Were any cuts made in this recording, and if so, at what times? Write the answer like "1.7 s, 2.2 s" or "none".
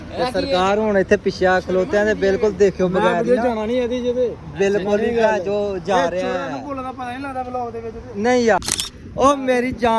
8.6 s